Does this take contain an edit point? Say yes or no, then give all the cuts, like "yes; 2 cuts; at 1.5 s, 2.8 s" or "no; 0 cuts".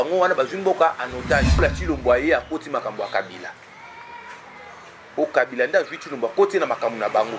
yes; 1 cut; at 1.6 s